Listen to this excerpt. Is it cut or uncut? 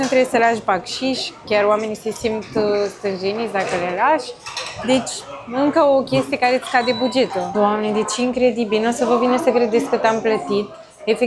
uncut